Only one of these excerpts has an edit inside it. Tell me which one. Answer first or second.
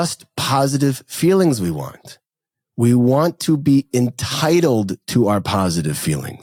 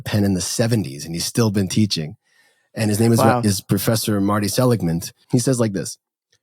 second